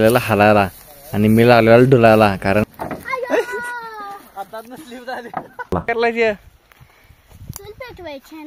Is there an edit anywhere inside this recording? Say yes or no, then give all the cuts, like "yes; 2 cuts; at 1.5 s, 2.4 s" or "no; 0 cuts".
yes; 2 cuts; at 2.6 s, 5.7 s